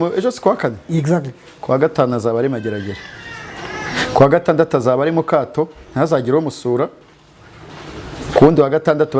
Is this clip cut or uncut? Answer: uncut